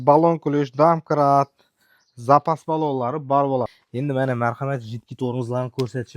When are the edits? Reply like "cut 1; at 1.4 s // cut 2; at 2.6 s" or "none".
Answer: cut 1; at 3.7 s